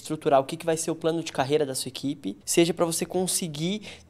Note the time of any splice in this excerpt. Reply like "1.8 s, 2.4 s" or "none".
2.3 s